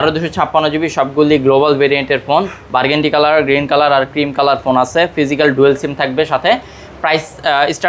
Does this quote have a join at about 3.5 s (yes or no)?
no